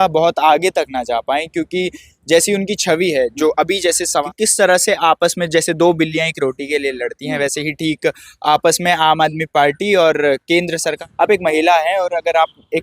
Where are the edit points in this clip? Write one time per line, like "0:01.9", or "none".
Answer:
0:04.2
0:11.0